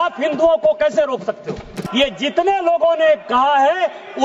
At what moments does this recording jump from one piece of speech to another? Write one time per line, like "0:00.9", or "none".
0:01.8